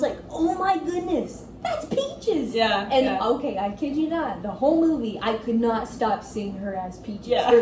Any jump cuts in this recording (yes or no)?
no